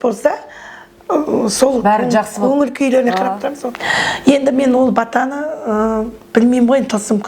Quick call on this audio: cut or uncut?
cut